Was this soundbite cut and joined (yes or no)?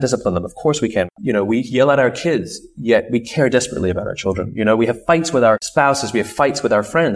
yes